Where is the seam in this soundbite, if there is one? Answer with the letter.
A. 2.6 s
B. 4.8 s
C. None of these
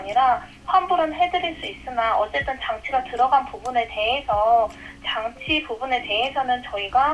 C